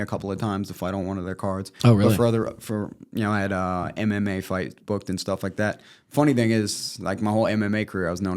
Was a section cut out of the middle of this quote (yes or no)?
no